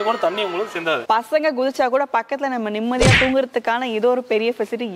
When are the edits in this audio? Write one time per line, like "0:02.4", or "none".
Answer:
0:01.0